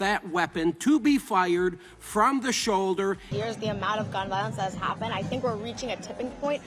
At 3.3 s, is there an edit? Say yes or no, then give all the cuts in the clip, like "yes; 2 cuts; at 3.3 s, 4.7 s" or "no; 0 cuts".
yes; 1 cut; at 3.3 s